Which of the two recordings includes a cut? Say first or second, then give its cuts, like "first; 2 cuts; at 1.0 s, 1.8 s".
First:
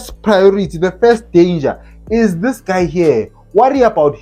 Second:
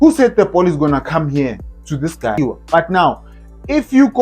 second; 1 cut; at 2.4 s